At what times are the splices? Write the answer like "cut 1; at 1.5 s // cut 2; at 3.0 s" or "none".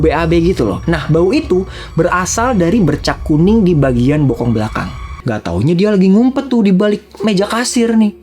cut 1; at 5.2 s